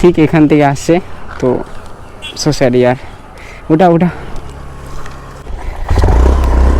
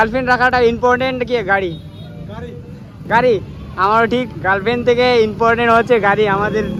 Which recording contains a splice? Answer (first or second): first